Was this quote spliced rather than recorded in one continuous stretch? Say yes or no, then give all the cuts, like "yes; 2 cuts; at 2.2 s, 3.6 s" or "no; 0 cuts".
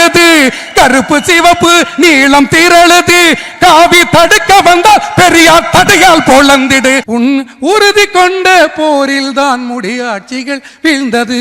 yes; 1 cut; at 7.0 s